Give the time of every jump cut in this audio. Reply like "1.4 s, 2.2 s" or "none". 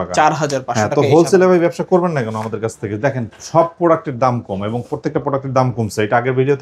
none